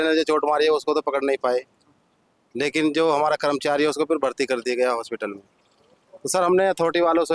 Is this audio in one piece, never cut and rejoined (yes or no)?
yes